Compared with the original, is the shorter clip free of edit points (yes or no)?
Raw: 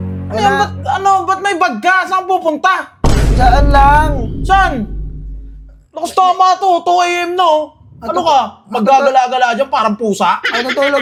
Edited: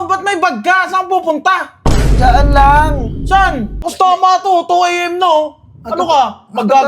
no